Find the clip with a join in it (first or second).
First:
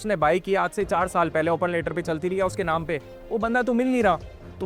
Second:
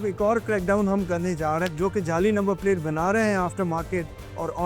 second